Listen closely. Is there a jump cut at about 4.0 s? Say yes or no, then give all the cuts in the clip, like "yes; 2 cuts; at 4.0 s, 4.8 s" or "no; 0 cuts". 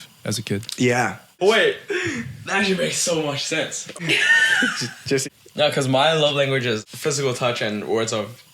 yes; 4 cuts; at 1.3 s, 4.0 s, 5.2 s, 6.9 s